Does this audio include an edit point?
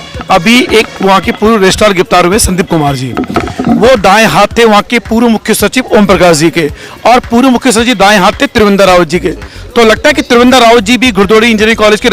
no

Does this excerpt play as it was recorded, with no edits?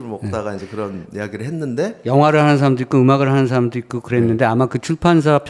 yes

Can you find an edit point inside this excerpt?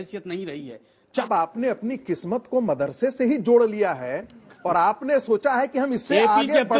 yes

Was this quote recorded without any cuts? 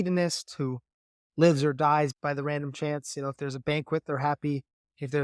no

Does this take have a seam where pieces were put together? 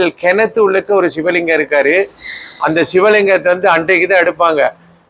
no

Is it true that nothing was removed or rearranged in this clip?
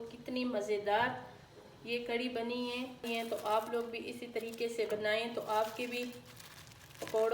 no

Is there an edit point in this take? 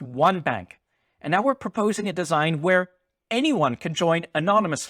no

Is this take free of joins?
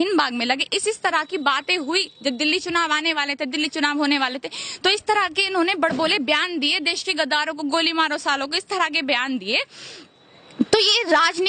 yes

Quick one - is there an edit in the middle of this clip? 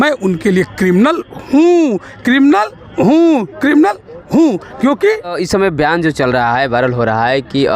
yes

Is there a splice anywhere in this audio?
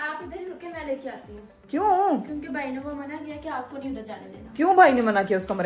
no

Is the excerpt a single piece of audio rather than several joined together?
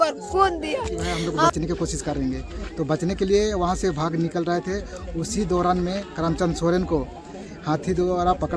no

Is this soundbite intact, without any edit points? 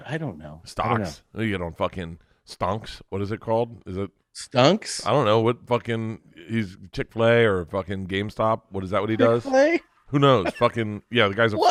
yes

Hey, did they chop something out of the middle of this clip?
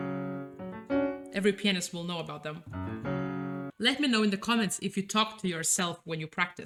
no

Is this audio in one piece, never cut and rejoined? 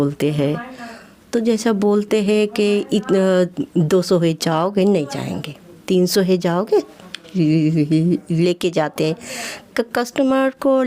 yes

